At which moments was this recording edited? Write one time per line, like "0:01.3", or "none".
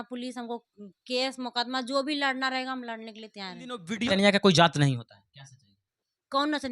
0:04.1